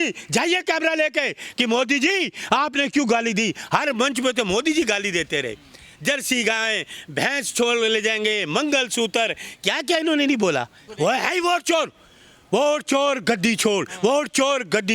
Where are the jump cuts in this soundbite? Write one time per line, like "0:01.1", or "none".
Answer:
0:10.8

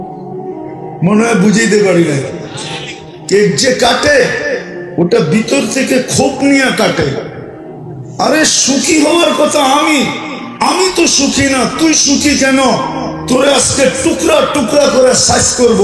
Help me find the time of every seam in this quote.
0:01.0

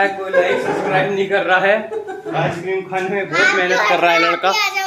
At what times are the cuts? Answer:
none

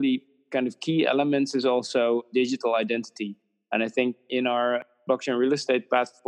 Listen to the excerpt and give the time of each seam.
0:02.3
0:04.8

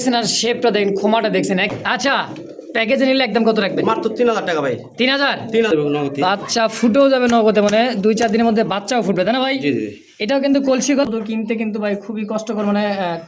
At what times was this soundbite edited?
0:01.7
0:05.7
0:11.1

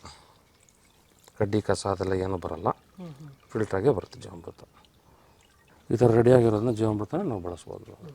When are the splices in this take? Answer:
none

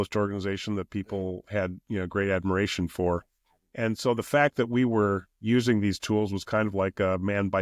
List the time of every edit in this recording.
none

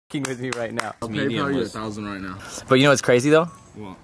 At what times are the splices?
0:01.0
0:02.3

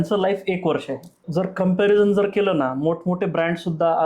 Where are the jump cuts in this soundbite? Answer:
0:01.2

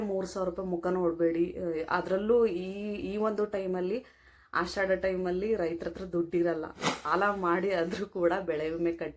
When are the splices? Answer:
0:07.1

